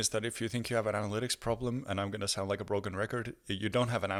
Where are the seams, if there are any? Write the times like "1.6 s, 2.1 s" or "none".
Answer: none